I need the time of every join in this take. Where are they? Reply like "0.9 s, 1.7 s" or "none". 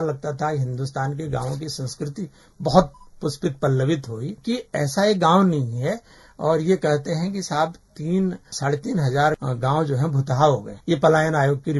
4.3 s, 8.5 s, 9.4 s, 10.7 s